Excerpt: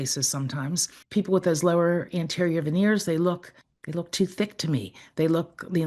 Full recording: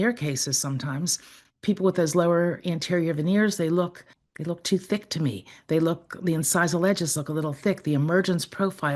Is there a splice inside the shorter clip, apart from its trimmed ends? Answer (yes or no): yes